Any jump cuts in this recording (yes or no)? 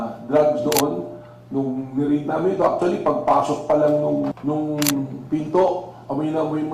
yes